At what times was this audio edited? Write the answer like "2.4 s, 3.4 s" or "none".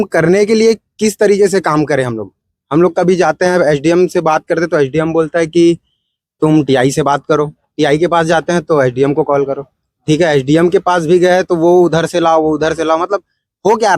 none